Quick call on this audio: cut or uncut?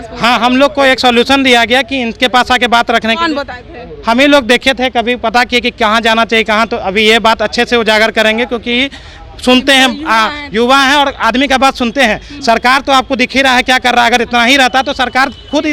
uncut